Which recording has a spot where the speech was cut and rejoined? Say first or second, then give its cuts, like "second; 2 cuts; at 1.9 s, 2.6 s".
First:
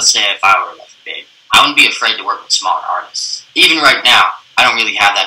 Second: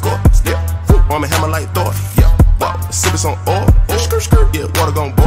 first; 1 cut; at 3.4 s